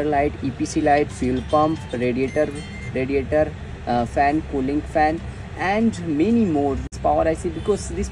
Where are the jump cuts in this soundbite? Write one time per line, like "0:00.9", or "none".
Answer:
0:06.9